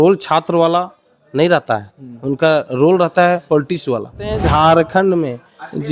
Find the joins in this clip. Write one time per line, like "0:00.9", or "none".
0:04.4